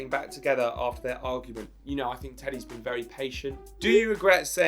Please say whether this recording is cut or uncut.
cut